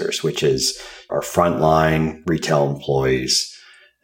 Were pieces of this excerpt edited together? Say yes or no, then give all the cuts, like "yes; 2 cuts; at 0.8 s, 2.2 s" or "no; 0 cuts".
yes; 1 cut; at 1.1 s